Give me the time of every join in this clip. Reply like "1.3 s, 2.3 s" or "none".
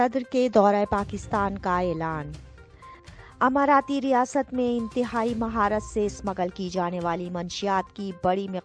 3.0 s